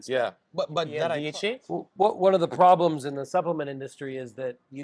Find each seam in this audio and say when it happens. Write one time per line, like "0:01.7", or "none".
0:01.0